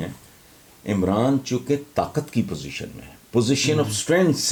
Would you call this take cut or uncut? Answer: uncut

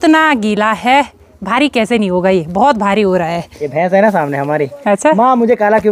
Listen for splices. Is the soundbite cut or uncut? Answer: cut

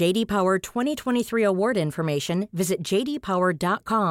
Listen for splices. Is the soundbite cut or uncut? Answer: uncut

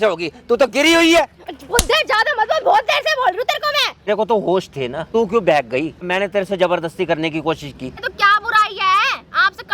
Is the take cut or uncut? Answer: cut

